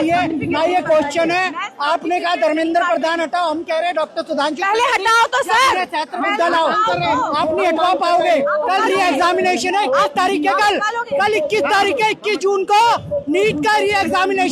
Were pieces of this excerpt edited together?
no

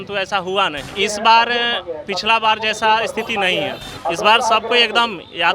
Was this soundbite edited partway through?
yes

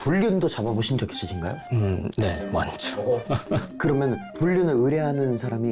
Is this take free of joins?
no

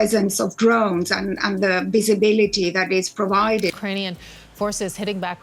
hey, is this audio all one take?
no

